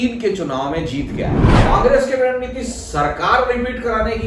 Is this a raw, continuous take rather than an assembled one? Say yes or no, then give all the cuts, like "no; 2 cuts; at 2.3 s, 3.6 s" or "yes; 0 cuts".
no; 1 cut; at 1.6 s